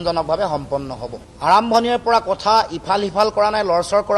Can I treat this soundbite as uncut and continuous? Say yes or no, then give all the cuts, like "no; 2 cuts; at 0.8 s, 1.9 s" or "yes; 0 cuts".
no; 1 cut; at 1.3 s